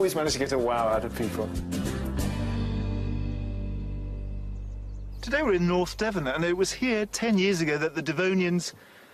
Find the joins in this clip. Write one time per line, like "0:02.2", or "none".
0:01.0